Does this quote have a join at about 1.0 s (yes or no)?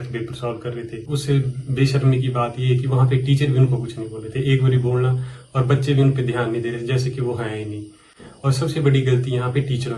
yes